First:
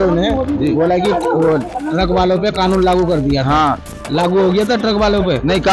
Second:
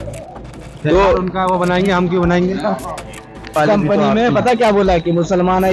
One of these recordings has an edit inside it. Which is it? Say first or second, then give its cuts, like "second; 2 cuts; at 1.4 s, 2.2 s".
second; 1 cut; at 3.6 s